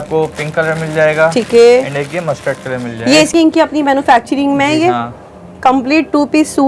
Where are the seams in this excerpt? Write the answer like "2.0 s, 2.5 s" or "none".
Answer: 3.3 s